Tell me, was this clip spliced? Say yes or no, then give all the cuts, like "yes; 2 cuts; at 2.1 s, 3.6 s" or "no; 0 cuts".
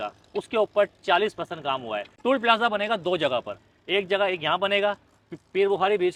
no; 0 cuts